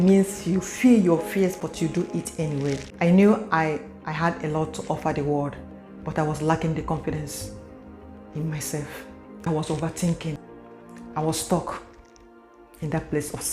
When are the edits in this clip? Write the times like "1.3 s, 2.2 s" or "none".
2.9 s, 9.5 s, 10.5 s